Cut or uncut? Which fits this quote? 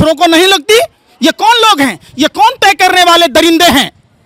uncut